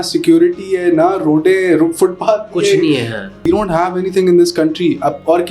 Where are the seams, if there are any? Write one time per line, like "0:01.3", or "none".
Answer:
0:03.4